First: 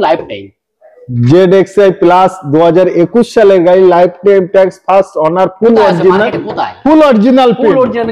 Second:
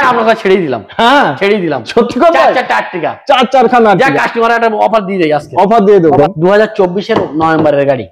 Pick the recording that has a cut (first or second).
second